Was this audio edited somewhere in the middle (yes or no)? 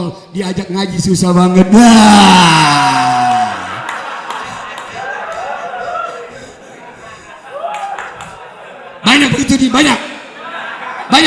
no